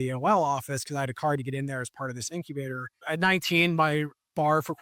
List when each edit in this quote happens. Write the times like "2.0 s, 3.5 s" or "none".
3.0 s